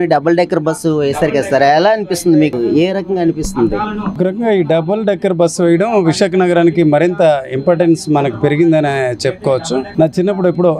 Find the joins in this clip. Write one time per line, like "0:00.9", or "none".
none

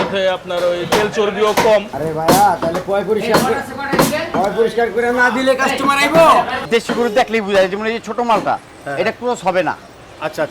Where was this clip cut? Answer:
0:02.0
0:06.6

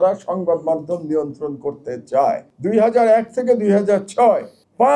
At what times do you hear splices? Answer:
0:02.5

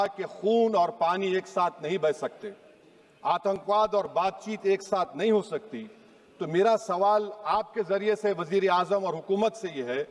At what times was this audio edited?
none

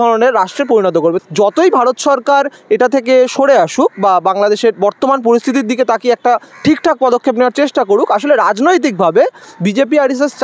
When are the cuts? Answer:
0:01.2

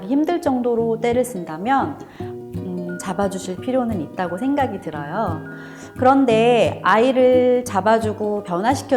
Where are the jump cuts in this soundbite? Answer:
none

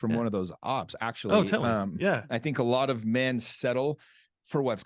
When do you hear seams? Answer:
0:02.2

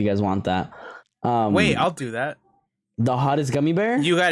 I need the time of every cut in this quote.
none

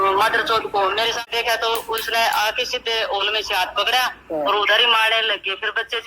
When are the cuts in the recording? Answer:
0:01.3

